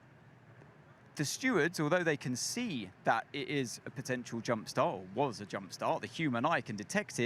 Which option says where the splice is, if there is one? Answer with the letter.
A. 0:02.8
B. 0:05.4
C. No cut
B